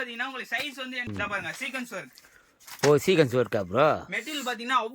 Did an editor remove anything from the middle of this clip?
yes; 1 cut; at 1.1 s

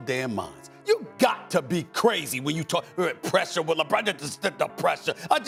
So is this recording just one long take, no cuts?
yes; 0 cuts

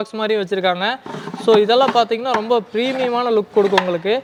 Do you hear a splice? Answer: no; 0 cuts

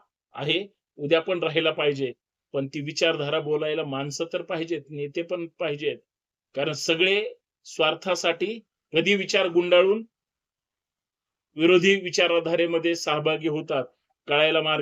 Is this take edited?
no; 0 cuts

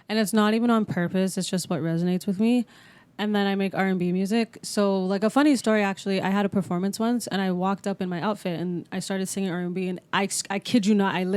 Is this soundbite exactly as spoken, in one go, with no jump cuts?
yes; 0 cuts

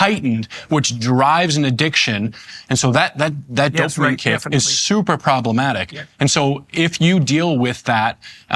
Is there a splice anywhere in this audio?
yes; 1 cut; at 2.4 s

